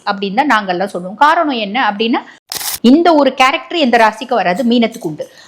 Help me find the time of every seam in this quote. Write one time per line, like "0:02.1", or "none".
0:02.4